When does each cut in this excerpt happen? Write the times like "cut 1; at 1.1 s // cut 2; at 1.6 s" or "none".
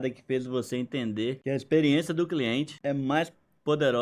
cut 1; at 1.4 s // cut 2; at 2.7 s